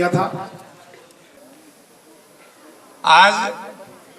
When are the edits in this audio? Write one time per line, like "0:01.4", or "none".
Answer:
0:01.4